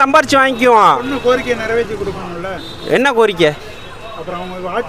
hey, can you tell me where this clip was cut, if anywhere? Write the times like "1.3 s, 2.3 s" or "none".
none